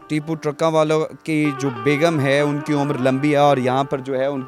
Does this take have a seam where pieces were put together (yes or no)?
no